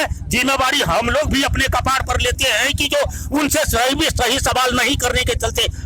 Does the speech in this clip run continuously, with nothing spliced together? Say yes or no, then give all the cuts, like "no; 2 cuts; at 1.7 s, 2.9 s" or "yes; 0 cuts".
yes; 0 cuts